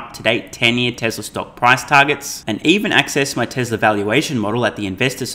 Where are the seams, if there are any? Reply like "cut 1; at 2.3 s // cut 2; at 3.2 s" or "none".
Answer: none